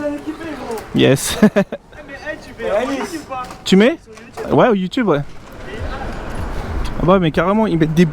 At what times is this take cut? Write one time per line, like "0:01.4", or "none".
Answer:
0:05.9